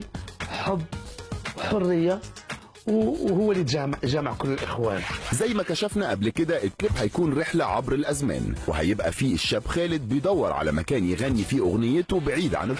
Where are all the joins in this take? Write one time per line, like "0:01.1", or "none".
0:00.9